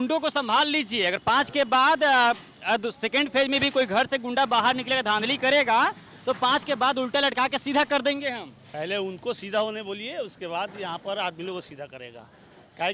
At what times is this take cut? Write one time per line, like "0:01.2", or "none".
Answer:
none